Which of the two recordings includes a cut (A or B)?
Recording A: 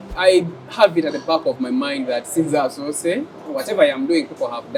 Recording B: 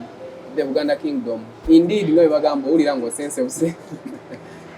B